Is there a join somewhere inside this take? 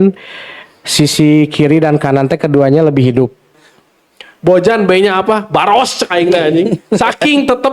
yes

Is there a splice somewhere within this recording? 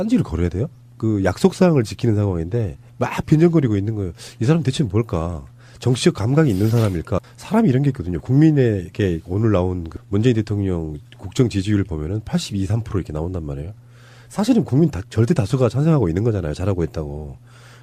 no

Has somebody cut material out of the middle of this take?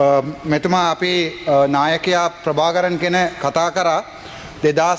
no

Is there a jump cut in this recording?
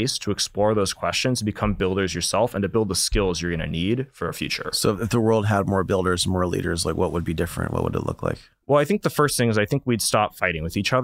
no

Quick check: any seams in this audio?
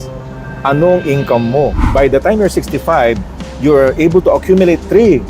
yes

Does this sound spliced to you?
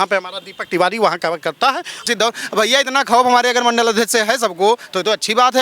yes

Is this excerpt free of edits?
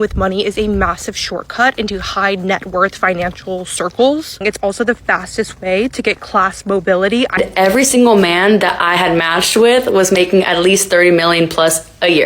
no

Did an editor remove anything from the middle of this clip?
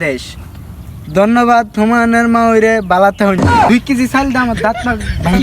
yes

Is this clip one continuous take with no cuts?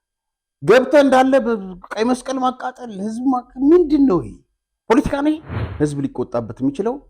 no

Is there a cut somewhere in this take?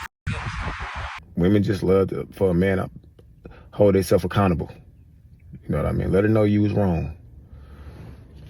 yes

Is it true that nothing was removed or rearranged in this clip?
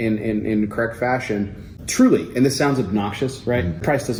yes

